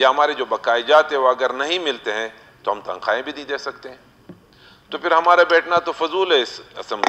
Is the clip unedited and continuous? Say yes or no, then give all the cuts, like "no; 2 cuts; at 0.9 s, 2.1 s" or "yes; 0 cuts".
yes; 0 cuts